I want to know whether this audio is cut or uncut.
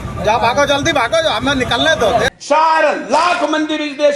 cut